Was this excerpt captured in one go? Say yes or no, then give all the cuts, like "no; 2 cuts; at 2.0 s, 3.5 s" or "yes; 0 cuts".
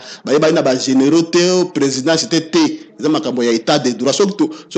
yes; 0 cuts